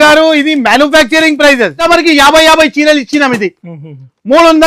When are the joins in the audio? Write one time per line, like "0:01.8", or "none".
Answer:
0:01.8